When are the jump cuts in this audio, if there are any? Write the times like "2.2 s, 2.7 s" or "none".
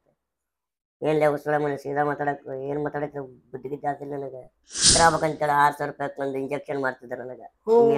4.9 s